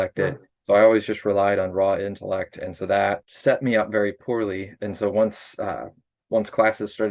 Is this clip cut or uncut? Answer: cut